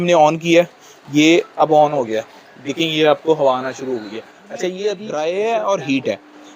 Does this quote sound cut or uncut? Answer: cut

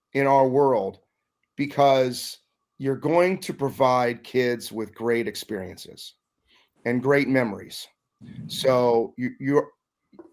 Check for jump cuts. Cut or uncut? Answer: uncut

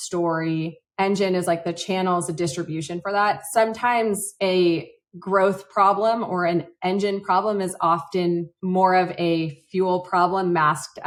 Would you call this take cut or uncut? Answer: uncut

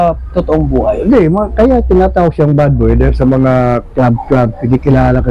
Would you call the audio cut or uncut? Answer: uncut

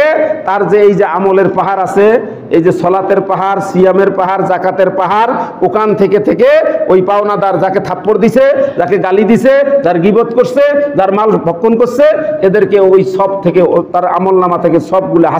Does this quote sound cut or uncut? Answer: uncut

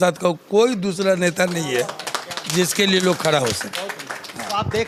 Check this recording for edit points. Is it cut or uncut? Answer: uncut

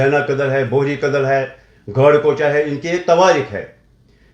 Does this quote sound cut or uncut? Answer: uncut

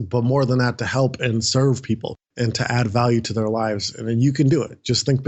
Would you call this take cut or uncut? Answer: uncut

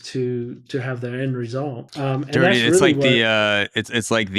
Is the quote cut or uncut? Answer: cut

